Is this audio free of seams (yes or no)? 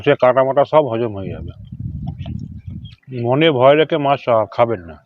no